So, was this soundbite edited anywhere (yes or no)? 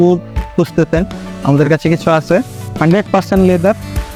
no